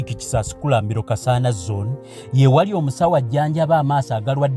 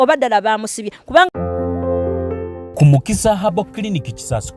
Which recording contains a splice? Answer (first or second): second